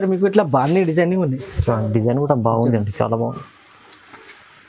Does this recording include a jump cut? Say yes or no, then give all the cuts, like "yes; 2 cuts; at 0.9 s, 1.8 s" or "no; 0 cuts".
no; 0 cuts